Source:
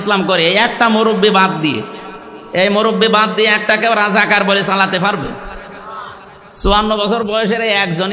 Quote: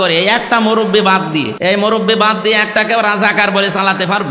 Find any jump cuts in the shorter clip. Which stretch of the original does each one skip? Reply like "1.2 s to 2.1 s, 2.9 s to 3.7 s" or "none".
1.8 s to 2.5 s